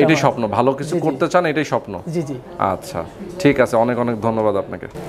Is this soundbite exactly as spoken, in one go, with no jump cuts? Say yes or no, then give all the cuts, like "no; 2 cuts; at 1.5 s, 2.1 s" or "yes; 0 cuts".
yes; 0 cuts